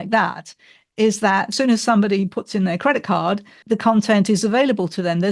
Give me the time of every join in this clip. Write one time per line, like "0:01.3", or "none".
0:01.5
0:03.6